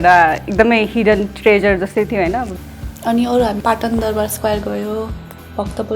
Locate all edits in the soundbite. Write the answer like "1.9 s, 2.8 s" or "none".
2.6 s